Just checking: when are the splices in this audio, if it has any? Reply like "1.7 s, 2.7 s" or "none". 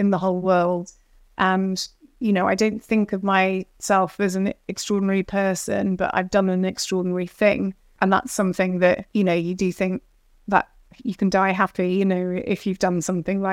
7.9 s, 9.0 s